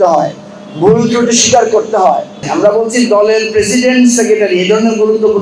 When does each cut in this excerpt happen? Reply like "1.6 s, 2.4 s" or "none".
2.4 s